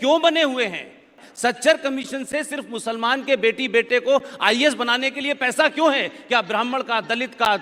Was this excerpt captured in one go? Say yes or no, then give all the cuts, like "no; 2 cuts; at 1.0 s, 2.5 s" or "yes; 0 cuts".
no; 1 cut; at 1.1 s